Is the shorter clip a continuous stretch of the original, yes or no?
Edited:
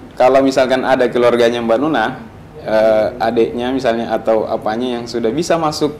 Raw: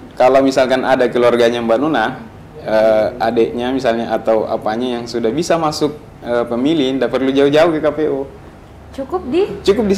yes